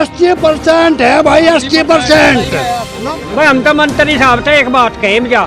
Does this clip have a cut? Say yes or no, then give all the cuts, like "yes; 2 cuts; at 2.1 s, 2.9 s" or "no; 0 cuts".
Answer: yes; 1 cut; at 3.1 s